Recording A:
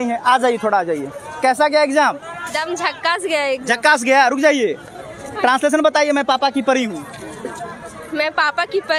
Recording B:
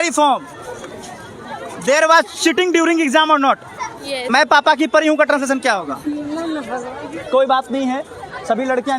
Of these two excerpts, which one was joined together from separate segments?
B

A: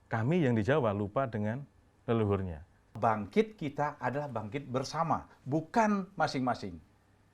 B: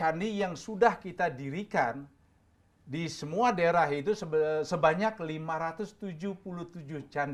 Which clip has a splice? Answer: A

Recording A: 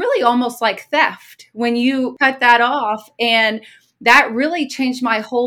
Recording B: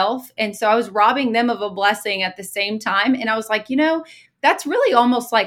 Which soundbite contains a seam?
A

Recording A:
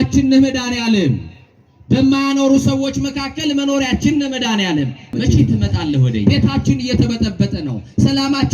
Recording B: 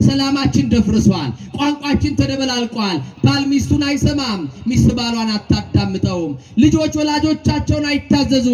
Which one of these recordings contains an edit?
A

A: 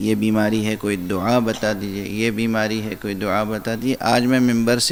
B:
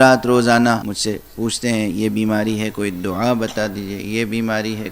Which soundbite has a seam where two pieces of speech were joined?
B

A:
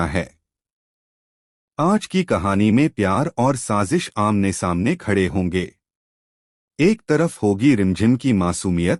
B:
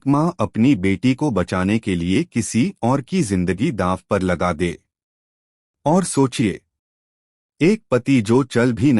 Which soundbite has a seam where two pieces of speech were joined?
B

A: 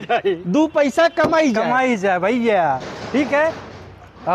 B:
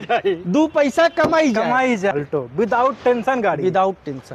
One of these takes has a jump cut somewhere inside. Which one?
B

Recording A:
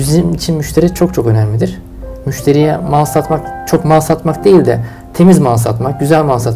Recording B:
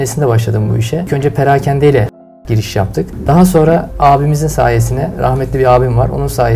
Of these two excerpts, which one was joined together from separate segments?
B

